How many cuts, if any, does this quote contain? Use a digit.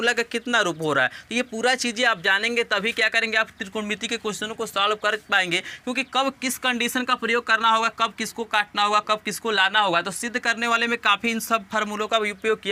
0